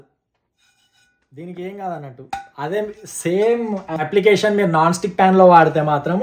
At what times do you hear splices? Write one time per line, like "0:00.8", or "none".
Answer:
0:03.9